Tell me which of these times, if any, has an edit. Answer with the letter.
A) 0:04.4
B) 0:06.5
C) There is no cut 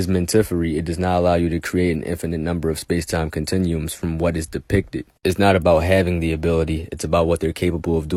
C